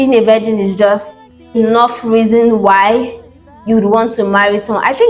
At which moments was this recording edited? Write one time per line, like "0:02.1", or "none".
0:01.6